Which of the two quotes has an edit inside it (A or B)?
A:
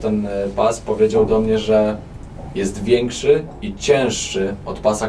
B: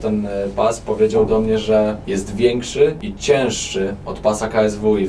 B